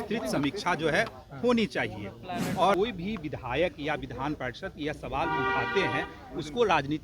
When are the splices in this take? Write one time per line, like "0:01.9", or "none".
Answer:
0:02.8